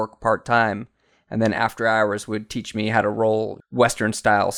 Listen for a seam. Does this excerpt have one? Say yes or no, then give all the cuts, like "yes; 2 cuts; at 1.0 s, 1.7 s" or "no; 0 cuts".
yes; 1 cut; at 3.6 s